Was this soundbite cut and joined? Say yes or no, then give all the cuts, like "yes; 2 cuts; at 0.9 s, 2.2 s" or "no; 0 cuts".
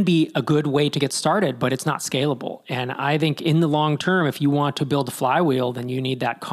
no; 0 cuts